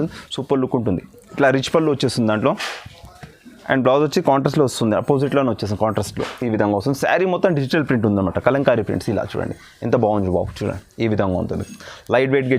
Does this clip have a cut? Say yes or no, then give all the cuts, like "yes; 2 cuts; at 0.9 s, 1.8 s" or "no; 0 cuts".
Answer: yes; 1 cut; at 1.3 s